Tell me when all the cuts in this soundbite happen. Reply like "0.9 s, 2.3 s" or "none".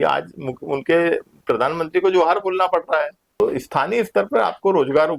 3.4 s